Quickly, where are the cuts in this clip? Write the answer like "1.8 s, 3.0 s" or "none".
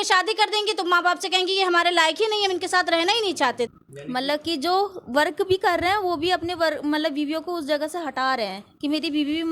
3.8 s